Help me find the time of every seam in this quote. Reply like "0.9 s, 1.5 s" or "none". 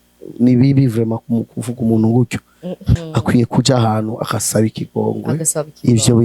2.9 s

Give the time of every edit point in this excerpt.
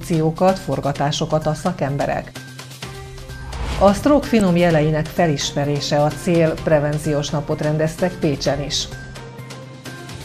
none

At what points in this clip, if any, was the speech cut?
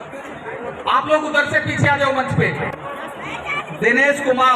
2.8 s

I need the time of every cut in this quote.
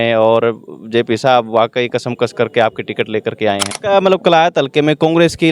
3.7 s

